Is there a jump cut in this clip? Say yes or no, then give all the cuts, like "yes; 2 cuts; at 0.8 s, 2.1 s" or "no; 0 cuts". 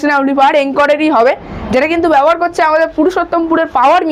no; 0 cuts